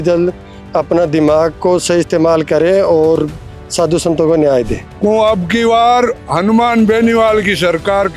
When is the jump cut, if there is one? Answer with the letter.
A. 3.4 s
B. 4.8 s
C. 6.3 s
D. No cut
B